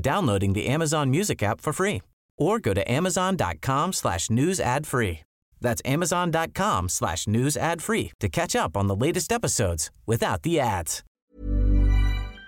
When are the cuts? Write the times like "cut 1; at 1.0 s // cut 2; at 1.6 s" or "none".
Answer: cut 1; at 11.0 s